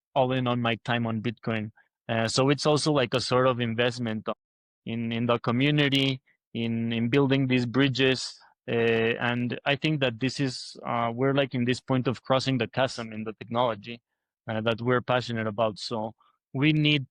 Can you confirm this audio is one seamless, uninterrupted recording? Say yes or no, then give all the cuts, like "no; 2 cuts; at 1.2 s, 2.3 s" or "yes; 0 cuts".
yes; 0 cuts